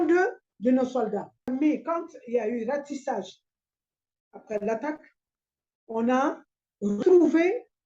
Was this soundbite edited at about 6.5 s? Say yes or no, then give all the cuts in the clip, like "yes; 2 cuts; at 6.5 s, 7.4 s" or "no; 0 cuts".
no; 1 cut; at 1.5 s